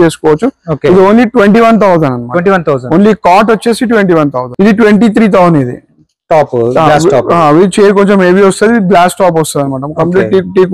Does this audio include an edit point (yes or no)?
yes